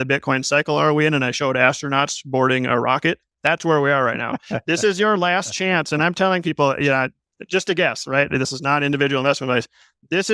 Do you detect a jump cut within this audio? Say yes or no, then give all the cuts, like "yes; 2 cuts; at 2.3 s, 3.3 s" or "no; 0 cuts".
no; 0 cuts